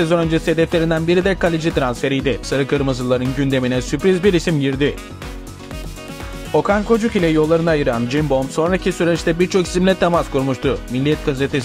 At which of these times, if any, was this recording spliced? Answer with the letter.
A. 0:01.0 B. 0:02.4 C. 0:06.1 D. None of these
B